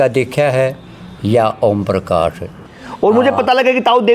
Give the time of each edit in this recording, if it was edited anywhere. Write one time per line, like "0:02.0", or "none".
0:02.7